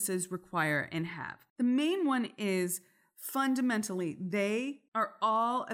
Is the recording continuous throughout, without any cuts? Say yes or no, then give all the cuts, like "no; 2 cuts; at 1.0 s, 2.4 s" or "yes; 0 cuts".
no; 1 cut; at 4.8 s